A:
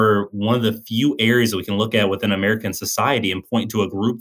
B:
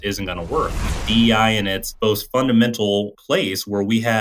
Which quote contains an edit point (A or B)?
B